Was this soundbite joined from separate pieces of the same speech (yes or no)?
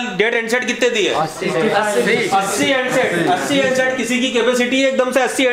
no